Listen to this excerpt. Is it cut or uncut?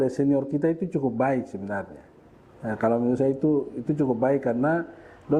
uncut